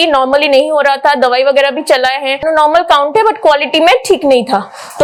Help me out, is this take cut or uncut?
uncut